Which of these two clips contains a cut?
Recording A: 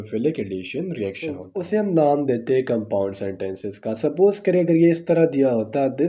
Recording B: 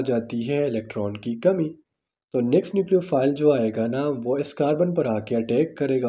A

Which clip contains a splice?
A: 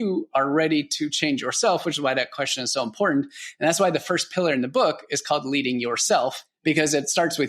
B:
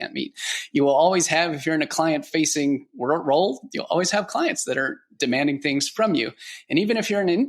A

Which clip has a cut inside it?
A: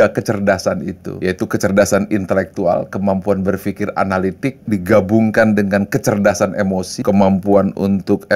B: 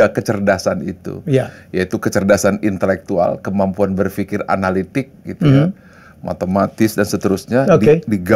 A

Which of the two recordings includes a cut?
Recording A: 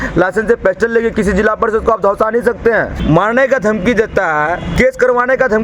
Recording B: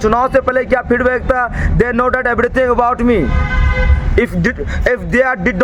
A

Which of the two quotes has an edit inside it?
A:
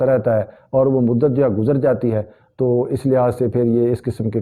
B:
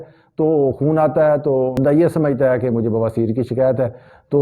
B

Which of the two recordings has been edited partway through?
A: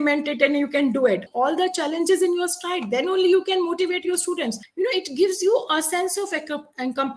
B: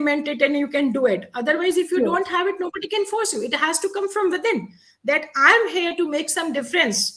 A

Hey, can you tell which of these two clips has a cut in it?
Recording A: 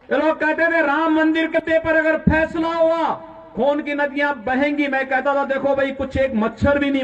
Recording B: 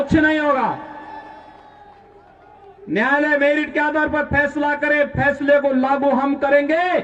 A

